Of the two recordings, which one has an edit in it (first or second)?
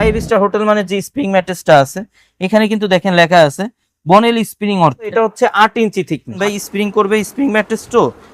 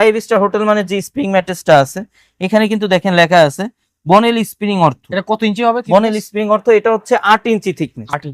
first